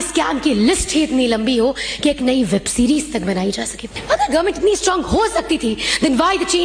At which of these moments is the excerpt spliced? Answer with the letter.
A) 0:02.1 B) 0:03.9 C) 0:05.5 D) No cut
B